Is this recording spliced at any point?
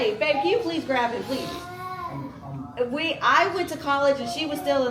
no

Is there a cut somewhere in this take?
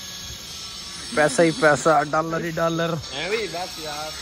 no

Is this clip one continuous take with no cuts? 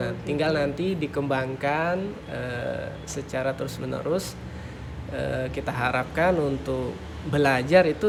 yes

